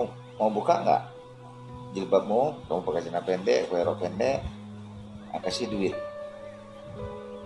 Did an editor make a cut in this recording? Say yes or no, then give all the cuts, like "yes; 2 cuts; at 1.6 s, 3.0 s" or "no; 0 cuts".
yes; 1 cut; at 6.4 s